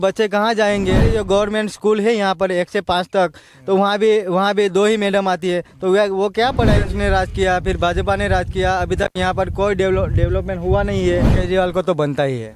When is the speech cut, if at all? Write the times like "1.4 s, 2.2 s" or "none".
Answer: 1.1 s, 6.8 s, 11.4 s